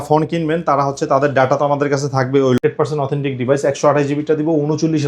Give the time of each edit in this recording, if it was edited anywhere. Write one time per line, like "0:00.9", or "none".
0:02.6